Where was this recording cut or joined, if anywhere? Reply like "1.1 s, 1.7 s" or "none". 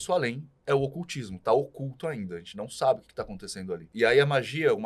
3.9 s